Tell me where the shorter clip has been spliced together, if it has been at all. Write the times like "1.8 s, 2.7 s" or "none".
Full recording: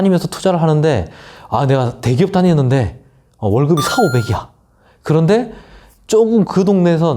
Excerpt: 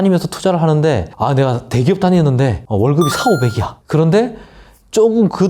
1.1 s, 2.6 s, 3.7 s